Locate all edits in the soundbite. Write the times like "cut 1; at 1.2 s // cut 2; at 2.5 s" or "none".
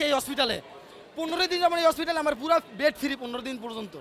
none